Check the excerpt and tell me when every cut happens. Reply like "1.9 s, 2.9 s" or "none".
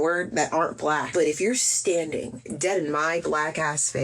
1.1 s, 2.4 s